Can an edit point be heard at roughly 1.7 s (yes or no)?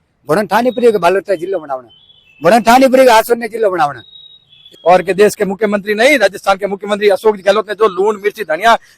no